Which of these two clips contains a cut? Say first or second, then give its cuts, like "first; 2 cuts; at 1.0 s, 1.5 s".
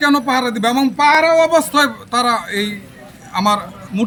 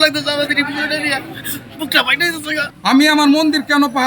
second; 1 cut; at 2.7 s